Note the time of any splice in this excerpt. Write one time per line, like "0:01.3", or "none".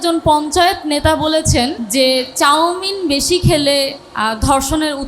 0:01.8
0:04.0